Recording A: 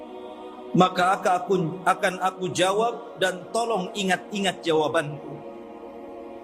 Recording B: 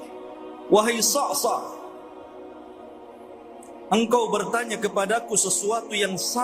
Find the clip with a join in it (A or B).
B